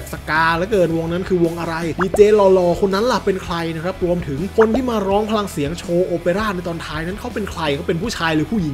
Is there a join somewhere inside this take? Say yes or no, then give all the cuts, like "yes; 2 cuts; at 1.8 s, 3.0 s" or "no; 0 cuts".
no; 0 cuts